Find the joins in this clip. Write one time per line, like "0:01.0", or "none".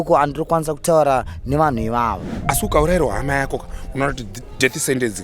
0:02.3